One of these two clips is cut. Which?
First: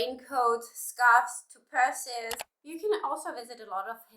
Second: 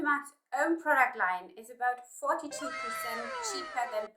first; 1 cut; at 2.4 s

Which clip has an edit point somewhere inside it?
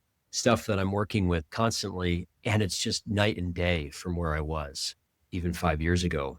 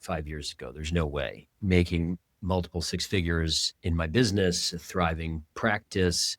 second; 1 cut; at 1.5 s

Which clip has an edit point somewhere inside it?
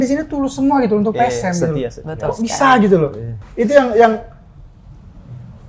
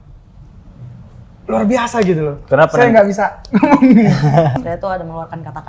second; 1 cut; at 4.5 s

